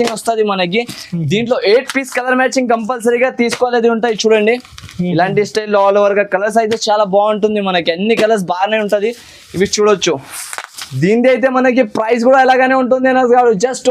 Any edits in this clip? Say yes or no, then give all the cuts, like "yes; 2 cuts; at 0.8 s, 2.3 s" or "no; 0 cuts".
no; 0 cuts